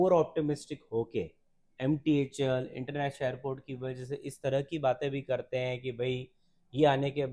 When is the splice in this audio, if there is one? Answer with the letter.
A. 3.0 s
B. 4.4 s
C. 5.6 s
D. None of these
D